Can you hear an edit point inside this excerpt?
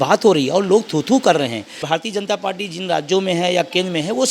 yes; 1 cut; at 1.8 s

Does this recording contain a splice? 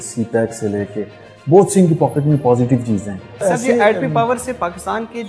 yes; 1 cut; at 3.4 s

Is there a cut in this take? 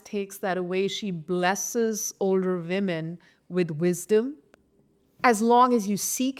no; 0 cuts

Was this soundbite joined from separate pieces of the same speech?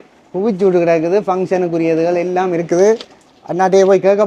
no; 0 cuts

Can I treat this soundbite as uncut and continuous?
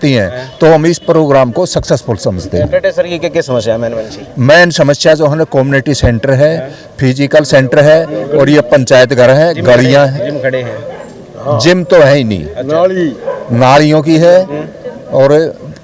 yes; 0 cuts

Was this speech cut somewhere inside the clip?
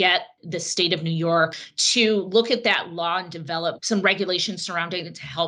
yes; 1 cut; at 1.6 s

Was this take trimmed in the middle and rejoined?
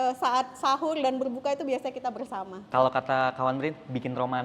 yes; 1 cut; at 2.7 s

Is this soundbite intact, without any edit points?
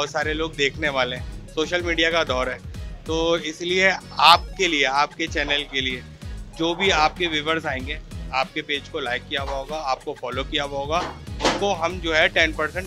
yes; 0 cuts

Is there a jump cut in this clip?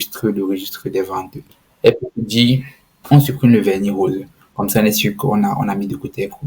yes; 1 cut; at 1.4 s

